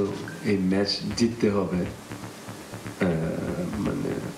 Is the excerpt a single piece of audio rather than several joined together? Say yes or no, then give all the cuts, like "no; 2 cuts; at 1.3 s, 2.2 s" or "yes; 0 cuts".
yes; 0 cuts